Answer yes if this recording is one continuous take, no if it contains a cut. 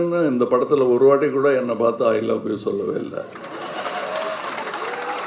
yes